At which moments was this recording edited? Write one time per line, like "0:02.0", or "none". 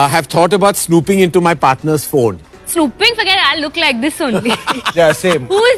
none